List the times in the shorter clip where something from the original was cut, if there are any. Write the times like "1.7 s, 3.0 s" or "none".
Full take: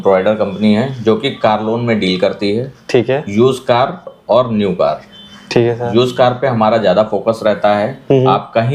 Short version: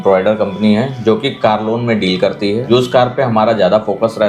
2.7 s